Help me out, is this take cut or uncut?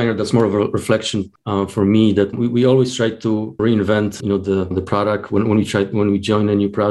cut